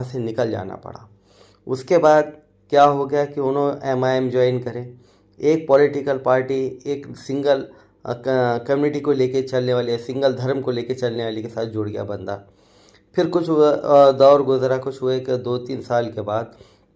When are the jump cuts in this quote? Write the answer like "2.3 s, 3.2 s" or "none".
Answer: none